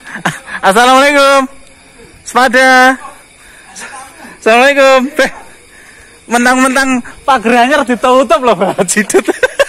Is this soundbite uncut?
yes; 0 cuts

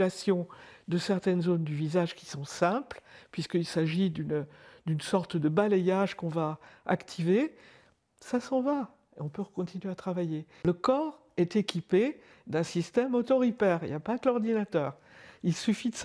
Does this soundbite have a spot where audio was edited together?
yes; 1 cut; at 10.5 s

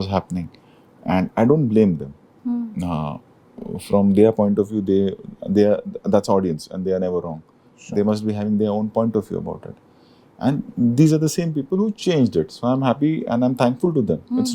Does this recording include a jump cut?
no; 0 cuts

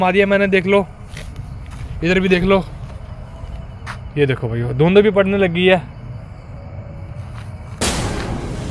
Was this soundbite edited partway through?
yes; 1 cut; at 7.8 s

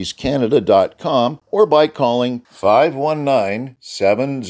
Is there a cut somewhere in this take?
yes; 1 cut; at 1.4 s

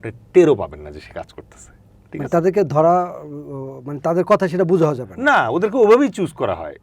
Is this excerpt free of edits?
yes; 0 cuts

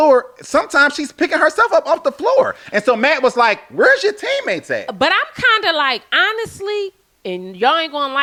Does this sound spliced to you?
no; 0 cuts

